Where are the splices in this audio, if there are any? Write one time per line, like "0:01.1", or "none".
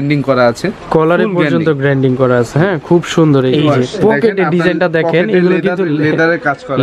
0:03.5